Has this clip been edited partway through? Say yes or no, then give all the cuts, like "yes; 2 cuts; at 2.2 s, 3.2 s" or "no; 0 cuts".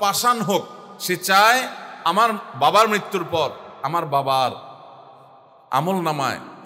no; 0 cuts